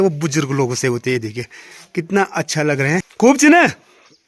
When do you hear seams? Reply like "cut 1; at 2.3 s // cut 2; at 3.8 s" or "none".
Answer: cut 1; at 3.1 s